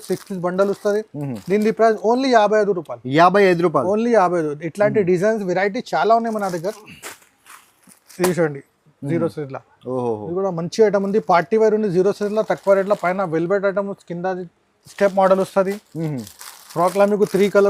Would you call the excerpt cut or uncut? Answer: uncut